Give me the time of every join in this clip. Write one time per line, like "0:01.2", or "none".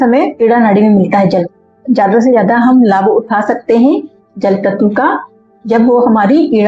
none